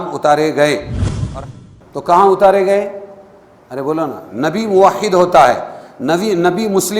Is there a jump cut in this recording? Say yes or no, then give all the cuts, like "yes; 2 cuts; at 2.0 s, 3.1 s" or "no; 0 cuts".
yes; 1 cut; at 1.3 s